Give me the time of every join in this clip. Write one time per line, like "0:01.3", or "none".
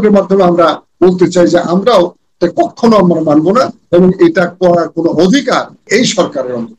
0:05.9